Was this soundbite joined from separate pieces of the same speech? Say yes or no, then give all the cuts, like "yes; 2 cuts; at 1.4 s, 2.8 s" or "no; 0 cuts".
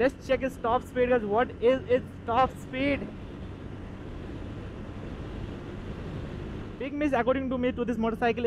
yes; 1 cut; at 6.8 s